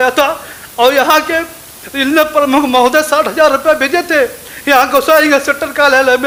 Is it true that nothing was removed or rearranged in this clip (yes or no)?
yes